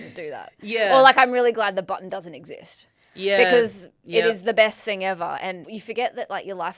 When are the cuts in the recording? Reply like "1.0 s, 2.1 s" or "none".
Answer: 5.7 s